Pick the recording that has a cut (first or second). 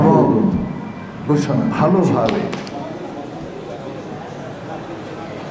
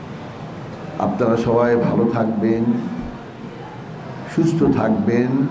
first